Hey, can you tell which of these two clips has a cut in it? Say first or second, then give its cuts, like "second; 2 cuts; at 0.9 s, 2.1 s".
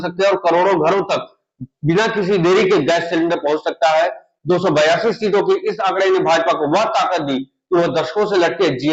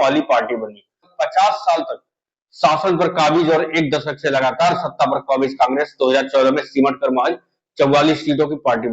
second; 1 cut; at 1.1 s